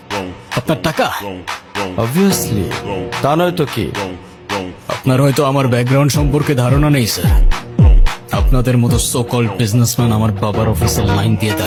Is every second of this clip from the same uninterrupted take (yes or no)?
yes